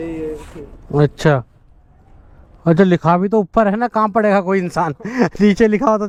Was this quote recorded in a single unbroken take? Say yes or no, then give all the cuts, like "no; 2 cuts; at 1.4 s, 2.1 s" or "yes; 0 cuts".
yes; 0 cuts